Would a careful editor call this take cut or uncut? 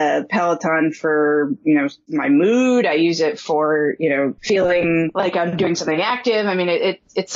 cut